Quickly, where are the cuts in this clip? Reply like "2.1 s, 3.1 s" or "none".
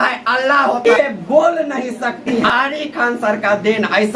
0.8 s, 2.4 s